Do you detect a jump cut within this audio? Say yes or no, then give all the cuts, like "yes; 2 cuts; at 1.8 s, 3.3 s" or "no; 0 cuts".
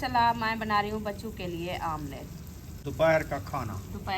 yes; 1 cut; at 2.7 s